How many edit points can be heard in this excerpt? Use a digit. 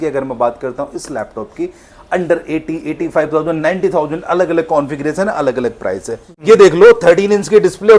1